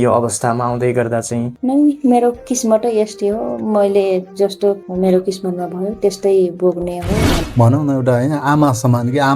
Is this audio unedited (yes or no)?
no